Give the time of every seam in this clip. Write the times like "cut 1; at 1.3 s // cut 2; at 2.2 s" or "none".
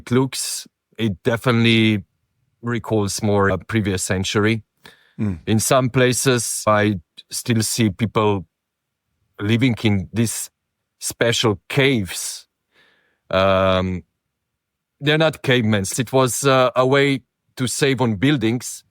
cut 1; at 3.5 s // cut 2; at 6.7 s // cut 3; at 15.9 s